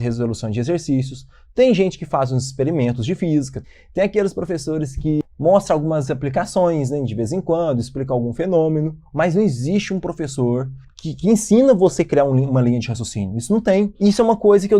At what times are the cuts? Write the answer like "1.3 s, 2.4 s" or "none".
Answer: 3.6 s, 5.2 s, 13.9 s